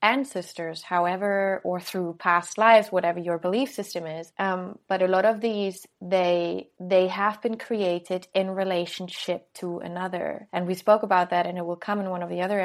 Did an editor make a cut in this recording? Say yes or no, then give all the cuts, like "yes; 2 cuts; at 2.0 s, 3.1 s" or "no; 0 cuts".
no; 0 cuts